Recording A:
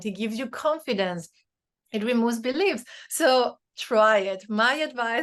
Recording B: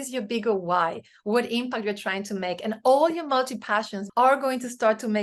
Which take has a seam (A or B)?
B